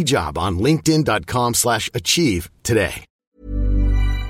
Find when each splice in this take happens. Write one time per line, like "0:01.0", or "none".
0:03.1